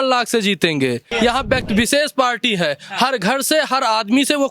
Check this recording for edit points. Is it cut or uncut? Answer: cut